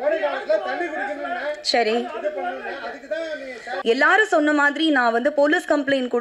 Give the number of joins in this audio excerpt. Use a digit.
1